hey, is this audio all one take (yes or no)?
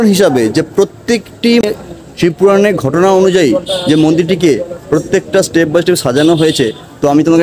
no